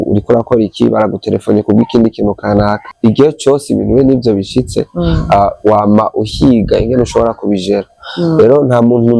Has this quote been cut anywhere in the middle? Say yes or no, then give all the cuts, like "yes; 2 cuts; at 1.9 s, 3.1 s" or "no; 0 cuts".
yes; 1 cut; at 2.9 s